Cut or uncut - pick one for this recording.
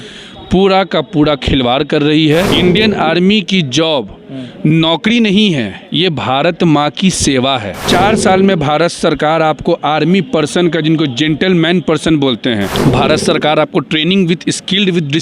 cut